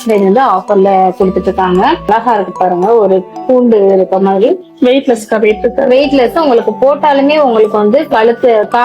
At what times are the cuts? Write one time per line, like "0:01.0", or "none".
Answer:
0:02.1